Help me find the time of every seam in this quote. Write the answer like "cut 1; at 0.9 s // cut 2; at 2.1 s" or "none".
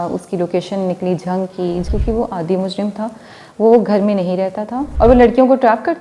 cut 1; at 1.9 s // cut 2; at 4.8 s